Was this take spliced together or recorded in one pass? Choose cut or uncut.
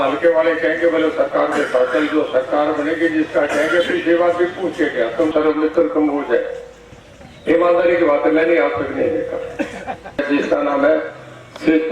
cut